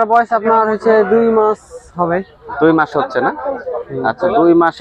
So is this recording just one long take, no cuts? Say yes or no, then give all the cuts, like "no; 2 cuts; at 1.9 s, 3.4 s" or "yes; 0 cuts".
yes; 0 cuts